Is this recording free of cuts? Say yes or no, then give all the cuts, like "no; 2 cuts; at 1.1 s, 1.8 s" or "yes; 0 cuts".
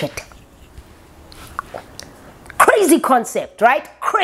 yes; 0 cuts